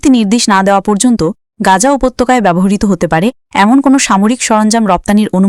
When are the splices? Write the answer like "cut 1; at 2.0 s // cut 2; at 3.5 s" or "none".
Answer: none